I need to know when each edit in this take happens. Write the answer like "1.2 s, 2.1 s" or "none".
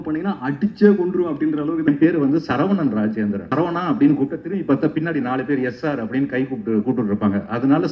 1.9 s, 3.4 s